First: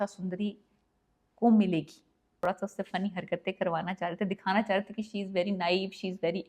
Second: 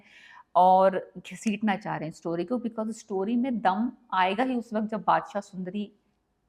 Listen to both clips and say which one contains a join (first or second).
first